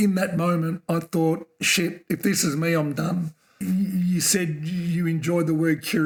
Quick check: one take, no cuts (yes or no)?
yes